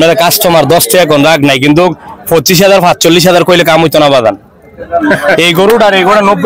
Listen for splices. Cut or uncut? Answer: uncut